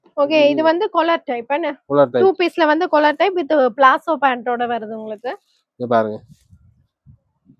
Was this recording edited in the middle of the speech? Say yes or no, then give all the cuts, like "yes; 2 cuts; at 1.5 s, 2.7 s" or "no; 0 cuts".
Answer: no; 0 cuts